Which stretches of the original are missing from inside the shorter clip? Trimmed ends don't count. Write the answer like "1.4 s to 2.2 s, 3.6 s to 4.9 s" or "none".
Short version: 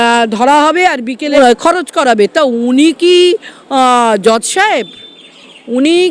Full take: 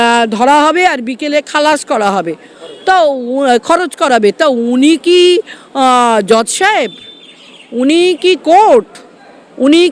1.3 s to 3.4 s